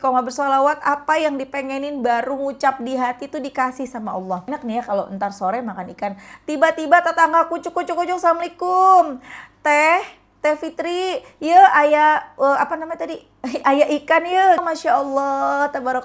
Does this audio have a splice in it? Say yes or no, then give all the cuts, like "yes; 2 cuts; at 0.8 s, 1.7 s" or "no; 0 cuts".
yes; 2 cuts; at 4.4 s, 14.6 s